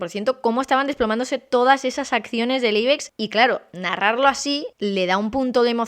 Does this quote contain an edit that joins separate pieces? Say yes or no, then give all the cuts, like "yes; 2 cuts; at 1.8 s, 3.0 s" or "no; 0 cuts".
yes; 2 cuts; at 3.1 s, 4.7 s